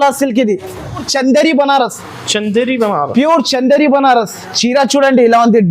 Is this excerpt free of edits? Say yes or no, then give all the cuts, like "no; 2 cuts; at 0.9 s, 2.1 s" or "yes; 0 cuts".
no; 1 cut; at 1.1 s